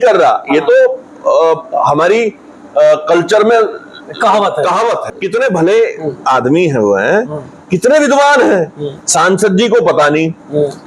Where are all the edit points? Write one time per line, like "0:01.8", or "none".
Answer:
0:05.0